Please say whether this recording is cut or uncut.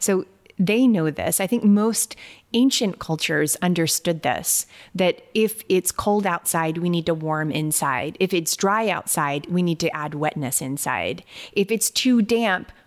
uncut